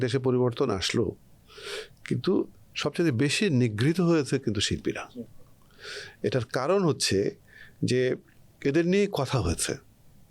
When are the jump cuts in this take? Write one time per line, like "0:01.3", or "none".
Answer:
none